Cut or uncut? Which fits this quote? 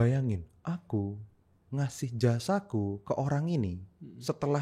uncut